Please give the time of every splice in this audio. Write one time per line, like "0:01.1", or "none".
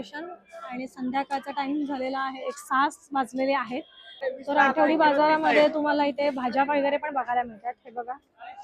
0:04.3